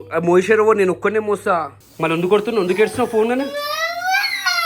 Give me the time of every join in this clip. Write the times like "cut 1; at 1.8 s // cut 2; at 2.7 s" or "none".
cut 1; at 1.8 s